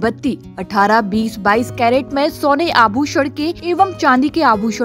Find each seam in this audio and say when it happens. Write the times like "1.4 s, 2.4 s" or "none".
3.6 s